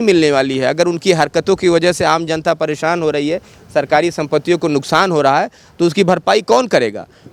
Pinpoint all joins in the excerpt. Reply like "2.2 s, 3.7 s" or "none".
none